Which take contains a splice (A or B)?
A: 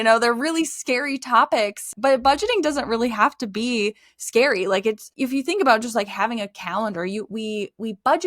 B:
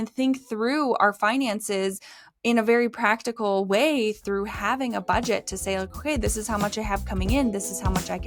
A